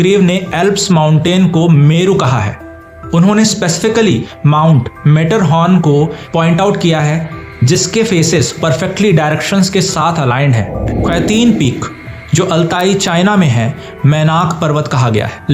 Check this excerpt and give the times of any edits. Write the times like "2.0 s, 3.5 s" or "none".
10.9 s